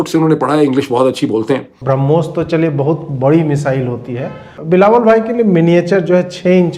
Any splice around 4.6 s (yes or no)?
yes